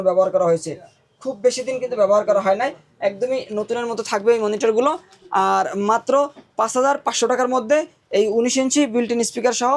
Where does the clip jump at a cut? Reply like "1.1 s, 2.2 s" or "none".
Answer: none